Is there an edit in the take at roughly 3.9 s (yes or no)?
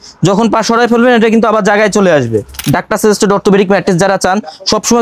no